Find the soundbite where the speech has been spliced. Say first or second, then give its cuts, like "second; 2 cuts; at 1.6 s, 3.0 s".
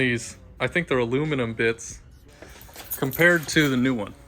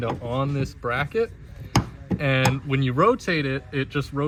first; 1 cut; at 2.6 s